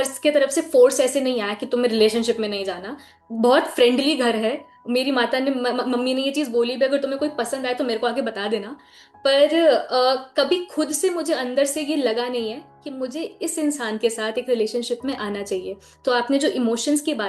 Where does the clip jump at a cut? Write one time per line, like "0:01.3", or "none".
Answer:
none

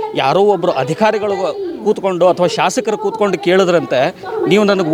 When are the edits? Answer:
none

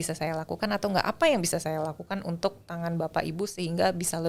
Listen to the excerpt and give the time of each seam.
none

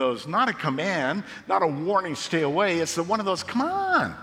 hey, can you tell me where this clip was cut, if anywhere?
none

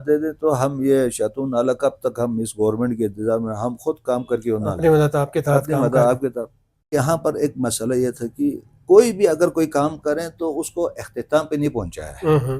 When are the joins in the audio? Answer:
0:06.9

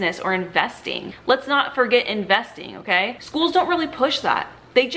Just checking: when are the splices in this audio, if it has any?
0:01.1

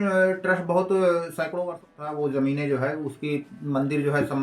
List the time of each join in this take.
0:01.6

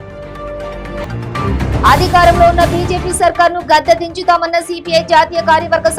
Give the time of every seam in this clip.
0:01.0

